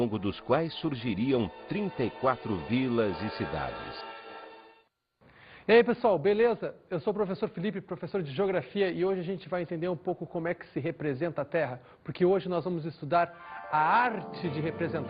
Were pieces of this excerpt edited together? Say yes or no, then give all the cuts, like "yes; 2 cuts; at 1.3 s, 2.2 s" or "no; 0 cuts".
no; 0 cuts